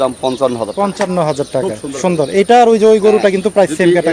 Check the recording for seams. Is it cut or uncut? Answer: uncut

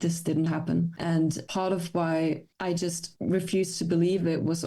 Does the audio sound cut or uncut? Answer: cut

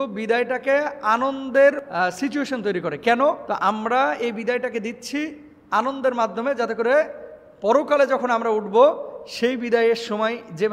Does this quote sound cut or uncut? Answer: cut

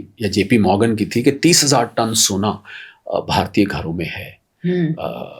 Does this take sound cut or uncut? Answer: uncut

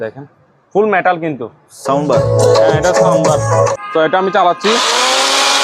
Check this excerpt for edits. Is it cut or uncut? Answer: cut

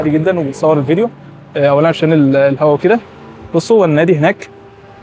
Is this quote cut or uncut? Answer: uncut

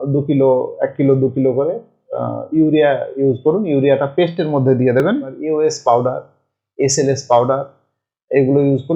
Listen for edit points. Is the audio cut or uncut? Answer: cut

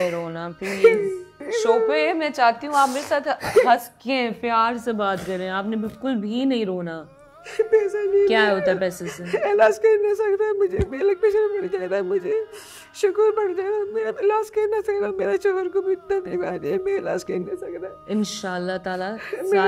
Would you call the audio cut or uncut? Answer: uncut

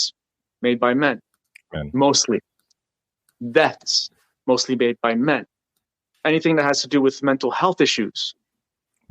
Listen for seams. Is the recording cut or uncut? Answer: cut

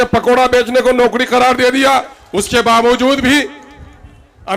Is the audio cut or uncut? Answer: cut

